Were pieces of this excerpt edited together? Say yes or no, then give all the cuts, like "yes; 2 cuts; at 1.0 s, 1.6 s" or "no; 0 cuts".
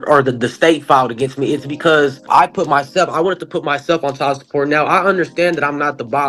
yes; 1 cut; at 2.2 s